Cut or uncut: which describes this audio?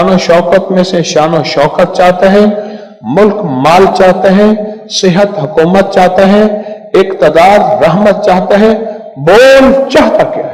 uncut